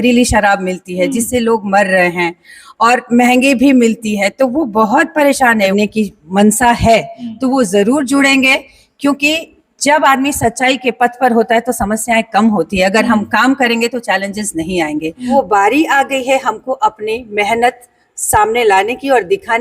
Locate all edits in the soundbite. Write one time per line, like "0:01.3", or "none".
0:05.7
0:15.3